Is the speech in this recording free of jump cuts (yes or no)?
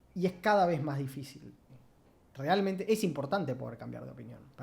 no